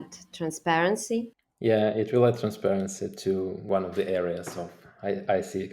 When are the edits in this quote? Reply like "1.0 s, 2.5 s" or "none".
1.4 s, 3.6 s

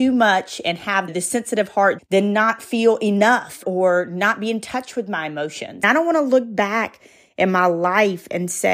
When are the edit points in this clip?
3.6 s, 5.8 s

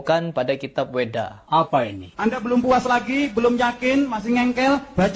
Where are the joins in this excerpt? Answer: 1.8 s

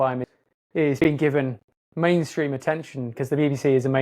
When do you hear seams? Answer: 0.9 s

